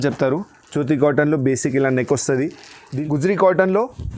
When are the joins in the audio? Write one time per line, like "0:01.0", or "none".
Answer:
0:02.9

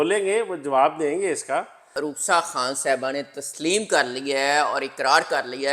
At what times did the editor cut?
0:01.8

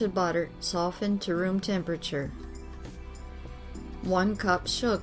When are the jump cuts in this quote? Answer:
0:02.3
0:04.0

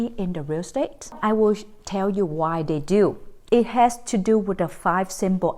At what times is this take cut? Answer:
0:01.2
0:03.3

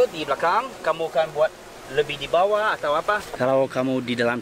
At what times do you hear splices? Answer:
0:03.4

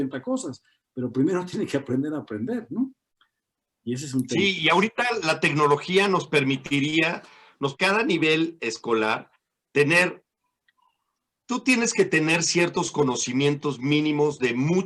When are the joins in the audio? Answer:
0:07.7

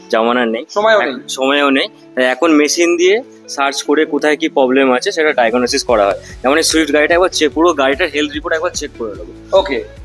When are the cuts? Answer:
none

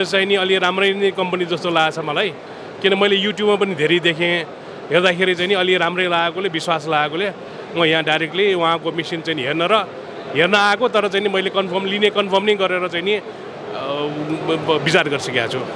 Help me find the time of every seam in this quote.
none

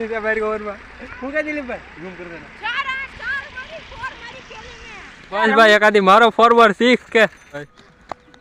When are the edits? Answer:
0:05.3
0:07.4

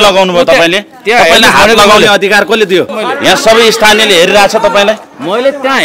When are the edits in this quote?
0:02.9

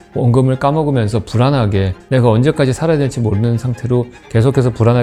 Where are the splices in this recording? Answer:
none

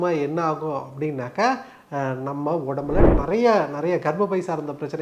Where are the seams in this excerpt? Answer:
0:03.1

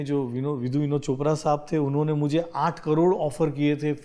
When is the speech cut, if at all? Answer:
none

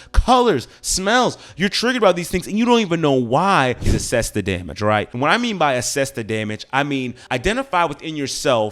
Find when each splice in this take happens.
0:03.8

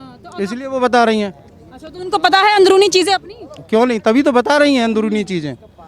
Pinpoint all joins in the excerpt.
none

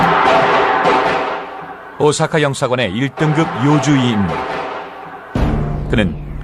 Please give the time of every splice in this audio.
0:01.2

